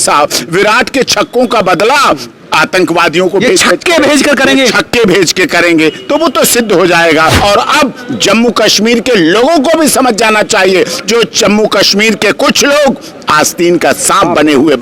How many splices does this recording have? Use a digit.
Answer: 1